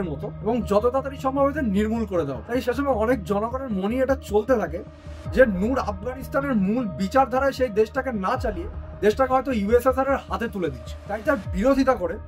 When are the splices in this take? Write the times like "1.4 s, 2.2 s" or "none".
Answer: none